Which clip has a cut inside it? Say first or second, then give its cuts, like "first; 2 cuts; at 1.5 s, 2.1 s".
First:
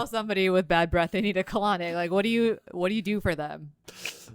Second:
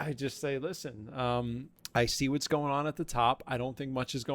second; 1 cut; at 1.7 s